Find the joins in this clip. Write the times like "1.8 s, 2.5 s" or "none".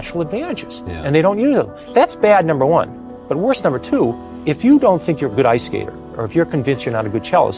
1.8 s, 4.3 s